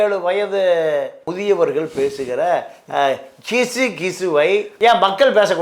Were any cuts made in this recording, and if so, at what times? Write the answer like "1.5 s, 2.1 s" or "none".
1.2 s, 4.7 s